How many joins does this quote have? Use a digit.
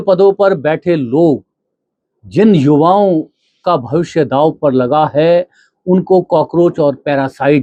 0